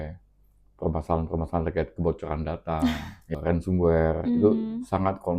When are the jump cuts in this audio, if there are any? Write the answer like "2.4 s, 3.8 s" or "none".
3.3 s